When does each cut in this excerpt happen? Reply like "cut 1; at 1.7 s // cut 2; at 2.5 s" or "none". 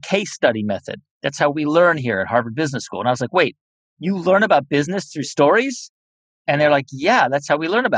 none